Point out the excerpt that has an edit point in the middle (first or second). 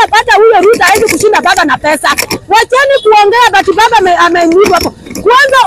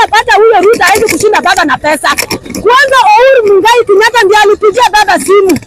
second